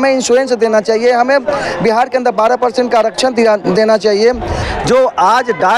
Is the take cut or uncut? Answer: cut